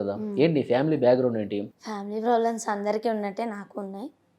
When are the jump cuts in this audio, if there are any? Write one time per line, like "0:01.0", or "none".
0:01.7